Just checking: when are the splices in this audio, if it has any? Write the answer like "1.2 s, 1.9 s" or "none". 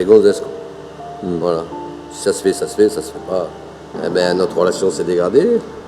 3.9 s